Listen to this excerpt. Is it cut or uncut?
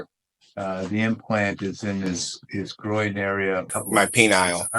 cut